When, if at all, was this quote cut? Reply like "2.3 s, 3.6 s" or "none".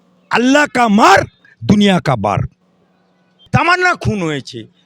3.5 s